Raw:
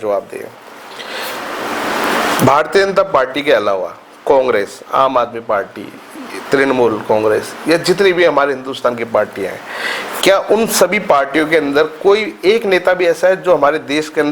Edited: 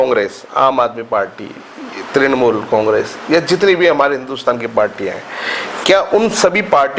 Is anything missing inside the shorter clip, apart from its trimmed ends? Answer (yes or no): no